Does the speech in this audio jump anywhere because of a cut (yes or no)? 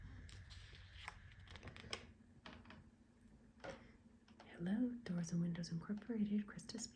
yes